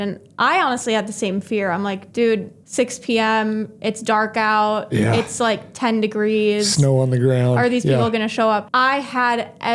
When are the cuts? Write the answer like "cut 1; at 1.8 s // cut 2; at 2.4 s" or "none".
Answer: cut 1; at 2.6 s // cut 2; at 8.7 s